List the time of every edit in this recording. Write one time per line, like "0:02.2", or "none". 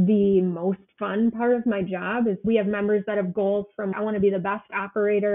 0:02.4